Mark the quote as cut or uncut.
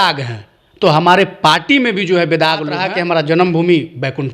cut